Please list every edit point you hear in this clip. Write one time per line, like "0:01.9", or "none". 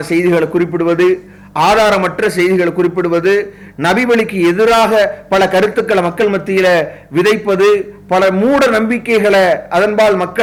none